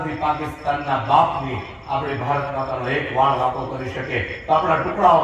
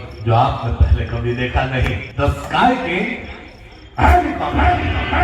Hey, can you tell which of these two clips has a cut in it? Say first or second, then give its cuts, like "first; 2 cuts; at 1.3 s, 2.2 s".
second; 1 cut; at 2.0 s